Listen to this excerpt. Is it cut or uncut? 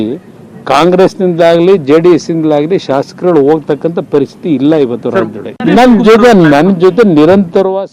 cut